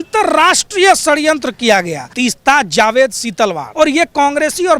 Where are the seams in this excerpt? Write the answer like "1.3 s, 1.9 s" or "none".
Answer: 2.0 s, 3.6 s